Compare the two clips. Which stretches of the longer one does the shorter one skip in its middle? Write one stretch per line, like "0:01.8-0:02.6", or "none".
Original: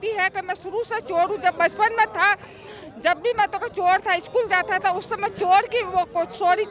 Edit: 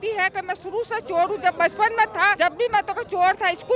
0:02.3-0:03.0